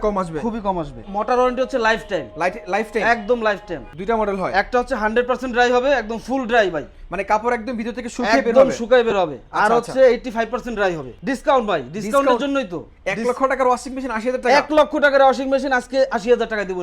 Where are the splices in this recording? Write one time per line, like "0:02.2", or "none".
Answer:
0:01.0
0:03.9
0:11.1